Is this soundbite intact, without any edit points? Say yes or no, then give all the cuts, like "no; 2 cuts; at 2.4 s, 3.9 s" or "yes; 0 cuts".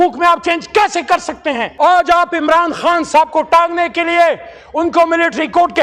no; 1 cut; at 1.6 s